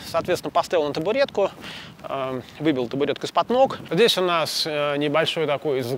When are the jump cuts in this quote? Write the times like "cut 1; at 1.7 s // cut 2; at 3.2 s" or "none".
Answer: cut 1; at 3.8 s